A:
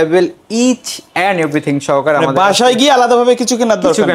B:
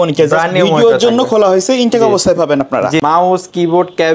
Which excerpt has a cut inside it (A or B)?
B